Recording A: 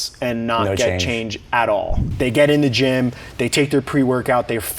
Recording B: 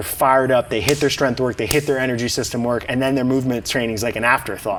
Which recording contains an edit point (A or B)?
A